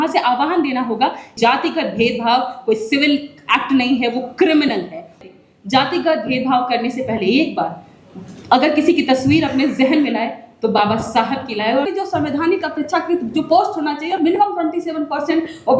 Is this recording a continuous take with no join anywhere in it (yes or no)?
no